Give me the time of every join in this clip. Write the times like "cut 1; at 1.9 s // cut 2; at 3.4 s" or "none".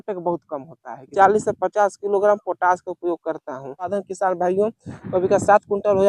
cut 1; at 1.1 s // cut 2; at 4.0 s